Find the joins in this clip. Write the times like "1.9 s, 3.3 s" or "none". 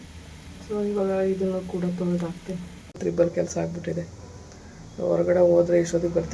3.0 s